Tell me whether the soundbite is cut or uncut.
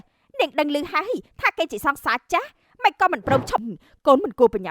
cut